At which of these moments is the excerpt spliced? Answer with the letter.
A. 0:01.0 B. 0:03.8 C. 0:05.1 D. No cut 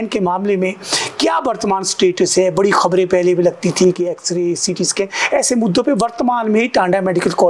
D